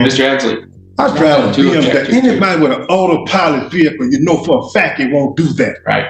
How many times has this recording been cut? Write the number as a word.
zero